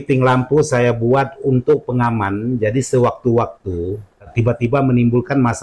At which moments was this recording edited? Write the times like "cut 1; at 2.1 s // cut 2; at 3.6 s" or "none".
cut 1; at 4.7 s